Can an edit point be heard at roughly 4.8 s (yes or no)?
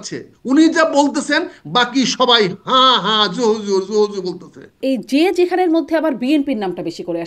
yes